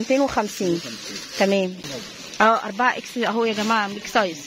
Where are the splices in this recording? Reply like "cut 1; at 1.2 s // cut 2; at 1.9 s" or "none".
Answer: cut 1; at 1.8 s